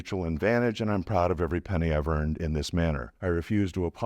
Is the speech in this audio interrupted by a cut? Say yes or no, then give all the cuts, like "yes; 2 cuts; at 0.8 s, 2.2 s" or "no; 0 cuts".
yes; 1 cut; at 3.1 s